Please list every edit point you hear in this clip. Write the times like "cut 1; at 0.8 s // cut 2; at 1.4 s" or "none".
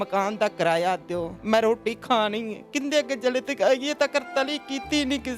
cut 1; at 1.3 s